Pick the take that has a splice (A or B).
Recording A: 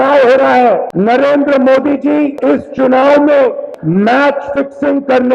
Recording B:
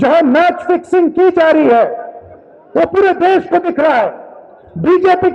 A